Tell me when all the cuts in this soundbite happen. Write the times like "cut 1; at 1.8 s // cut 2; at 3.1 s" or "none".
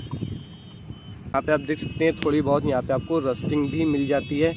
cut 1; at 1.3 s